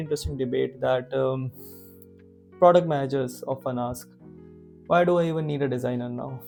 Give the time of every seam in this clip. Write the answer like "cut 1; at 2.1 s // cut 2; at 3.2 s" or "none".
none

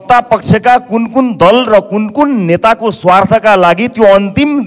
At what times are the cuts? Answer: none

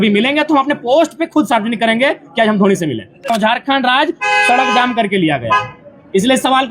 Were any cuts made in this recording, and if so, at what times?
cut 1; at 3.3 s

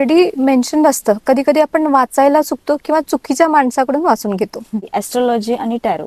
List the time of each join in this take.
cut 1; at 4.9 s

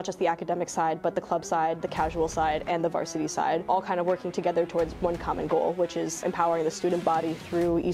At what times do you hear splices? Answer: cut 1; at 3.7 s // cut 2; at 6.2 s

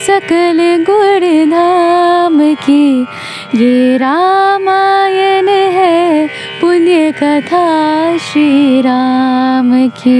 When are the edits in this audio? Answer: none

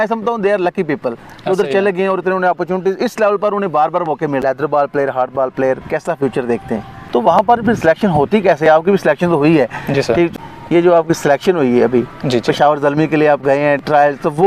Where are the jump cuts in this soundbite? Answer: cut 1; at 4.4 s // cut 2; at 6.9 s // cut 3; at 10.3 s

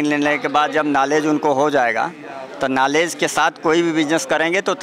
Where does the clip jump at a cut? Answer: none

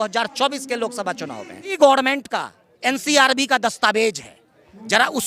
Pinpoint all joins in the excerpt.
cut 1; at 1.8 s

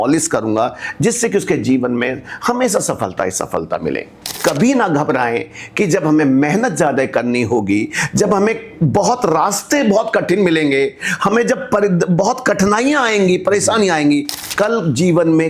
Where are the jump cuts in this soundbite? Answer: cut 1; at 4.4 s // cut 2; at 14.4 s

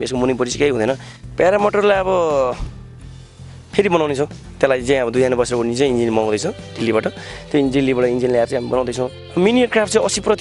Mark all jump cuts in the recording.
cut 1; at 1.1 s // cut 2; at 9.2 s

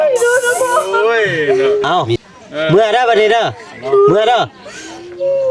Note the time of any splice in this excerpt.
cut 1; at 0.9 s

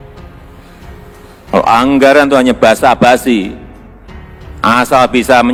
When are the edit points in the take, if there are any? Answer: none

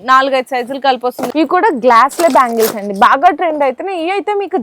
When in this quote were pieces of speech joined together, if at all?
cut 1; at 1.2 s

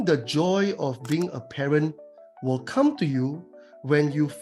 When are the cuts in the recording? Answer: none

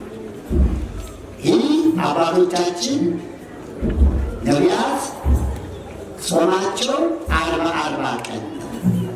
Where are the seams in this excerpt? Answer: none

